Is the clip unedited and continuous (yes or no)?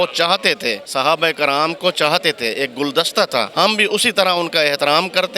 no